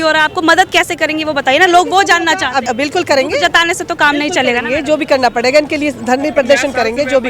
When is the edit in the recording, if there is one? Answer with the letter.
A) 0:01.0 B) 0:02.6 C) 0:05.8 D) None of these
B